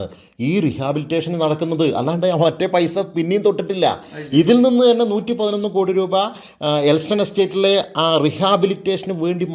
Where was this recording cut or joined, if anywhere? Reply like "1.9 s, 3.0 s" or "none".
none